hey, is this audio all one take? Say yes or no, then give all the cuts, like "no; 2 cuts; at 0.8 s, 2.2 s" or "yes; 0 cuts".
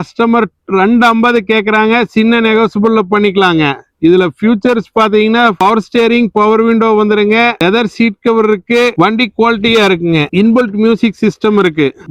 yes; 0 cuts